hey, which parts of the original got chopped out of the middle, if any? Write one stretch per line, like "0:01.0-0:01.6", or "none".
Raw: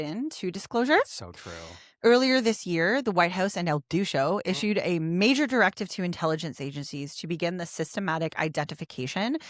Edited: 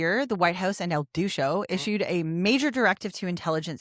none